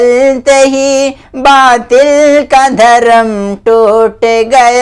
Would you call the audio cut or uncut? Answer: uncut